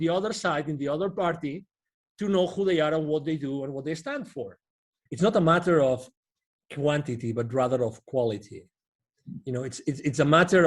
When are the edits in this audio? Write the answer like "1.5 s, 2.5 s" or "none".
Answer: 5.0 s

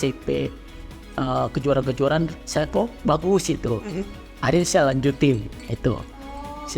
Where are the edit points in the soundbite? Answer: none

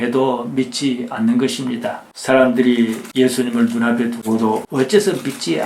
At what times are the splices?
2.0 s

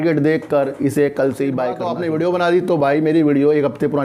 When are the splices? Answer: 1.9 s

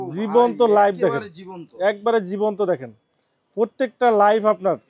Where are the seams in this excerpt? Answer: none

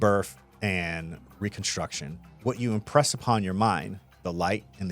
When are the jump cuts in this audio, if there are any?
2.2 s

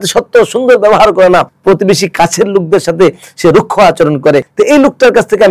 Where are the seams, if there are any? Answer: 1.5 s, 4.5 s

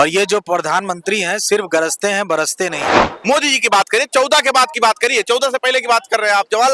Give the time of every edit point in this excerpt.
3.1 s

